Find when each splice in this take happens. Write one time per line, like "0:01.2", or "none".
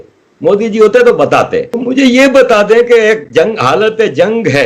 0:01.7